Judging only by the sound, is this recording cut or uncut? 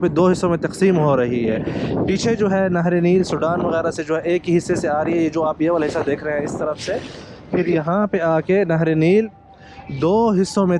uncut